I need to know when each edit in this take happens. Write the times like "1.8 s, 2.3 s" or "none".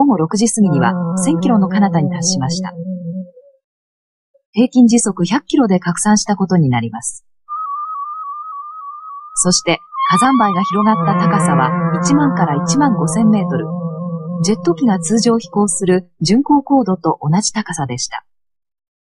9.4 s